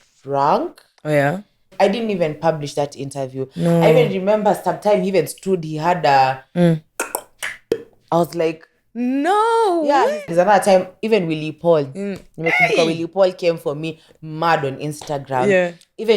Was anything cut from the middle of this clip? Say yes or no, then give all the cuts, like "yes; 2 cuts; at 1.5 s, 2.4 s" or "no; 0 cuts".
yes; 2 cuts; at 1.7 s, 10.3 s